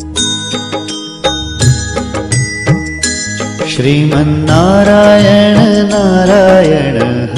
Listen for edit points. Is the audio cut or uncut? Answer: uncut